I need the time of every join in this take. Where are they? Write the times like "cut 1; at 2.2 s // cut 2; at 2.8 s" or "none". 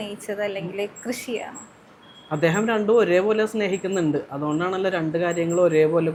none